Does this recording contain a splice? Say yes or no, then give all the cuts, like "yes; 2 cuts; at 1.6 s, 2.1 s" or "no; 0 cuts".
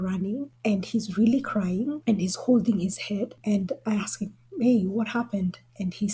no; 0 cuts